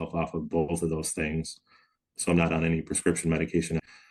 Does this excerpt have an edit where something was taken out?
no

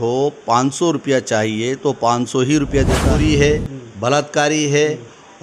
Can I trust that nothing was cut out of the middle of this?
no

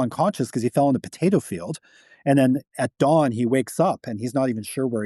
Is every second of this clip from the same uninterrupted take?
yes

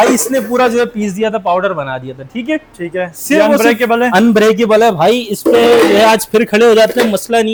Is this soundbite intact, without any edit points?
yes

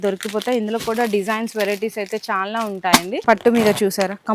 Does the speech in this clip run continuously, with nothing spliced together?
no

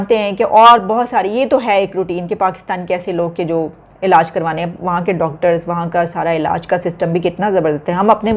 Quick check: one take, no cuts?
yes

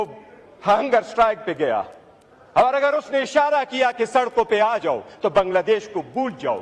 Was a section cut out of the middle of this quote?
no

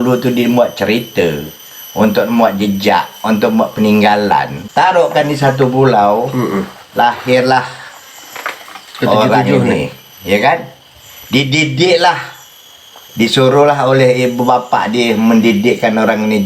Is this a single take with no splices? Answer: no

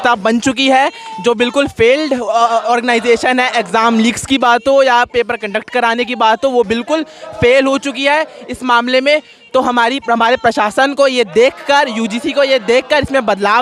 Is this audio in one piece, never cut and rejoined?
yes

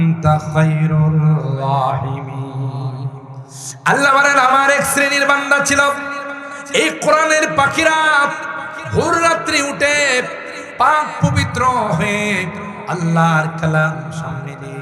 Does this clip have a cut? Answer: no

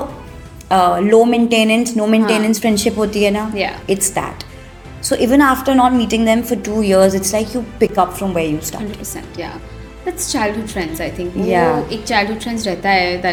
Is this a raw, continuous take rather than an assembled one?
yes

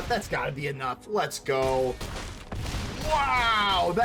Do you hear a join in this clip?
no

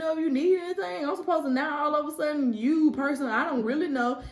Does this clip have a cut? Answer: no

